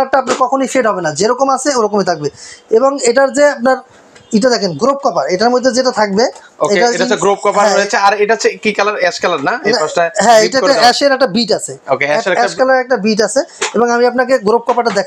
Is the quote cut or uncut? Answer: uncut